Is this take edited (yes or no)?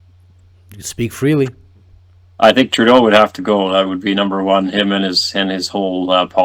no